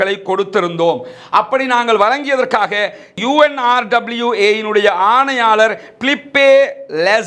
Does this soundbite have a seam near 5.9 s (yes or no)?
no